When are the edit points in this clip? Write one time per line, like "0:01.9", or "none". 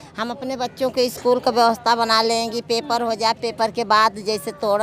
none